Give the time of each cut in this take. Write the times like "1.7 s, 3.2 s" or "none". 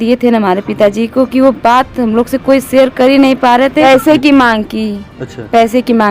3.8 s